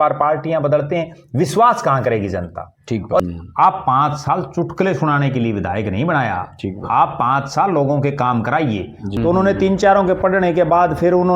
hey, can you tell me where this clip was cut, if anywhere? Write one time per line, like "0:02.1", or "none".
0:03.2
0:09.0